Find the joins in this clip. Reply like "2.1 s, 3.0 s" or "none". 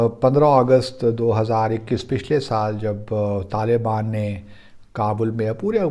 none